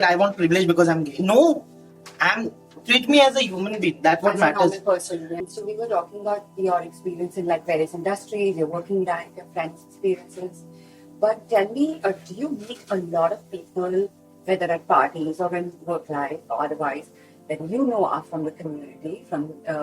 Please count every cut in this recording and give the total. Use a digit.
1